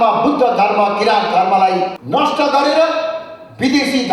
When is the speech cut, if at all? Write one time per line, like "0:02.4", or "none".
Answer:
0:02.0